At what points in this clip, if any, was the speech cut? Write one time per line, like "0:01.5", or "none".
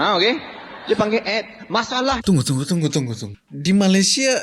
0:03.5